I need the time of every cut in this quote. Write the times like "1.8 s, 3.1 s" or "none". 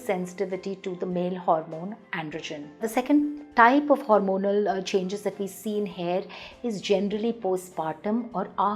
none